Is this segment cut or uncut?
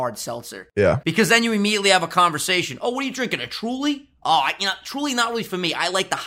cut